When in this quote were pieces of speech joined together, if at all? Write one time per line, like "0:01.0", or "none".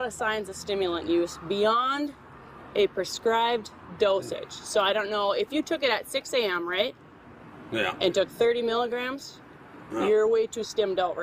none